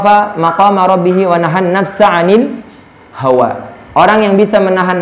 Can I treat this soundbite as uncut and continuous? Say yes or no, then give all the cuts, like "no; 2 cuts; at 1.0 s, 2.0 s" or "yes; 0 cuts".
yes; 0 cuts